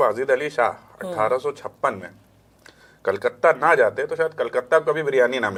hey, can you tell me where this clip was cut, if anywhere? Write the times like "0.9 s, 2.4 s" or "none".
none